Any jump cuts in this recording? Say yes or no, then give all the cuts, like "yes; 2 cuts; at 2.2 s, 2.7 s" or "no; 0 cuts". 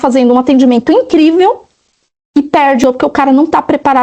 yes; 1 cut; at 2.8 s